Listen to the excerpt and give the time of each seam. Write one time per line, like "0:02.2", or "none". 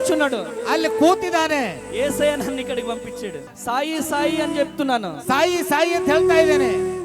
0:03.4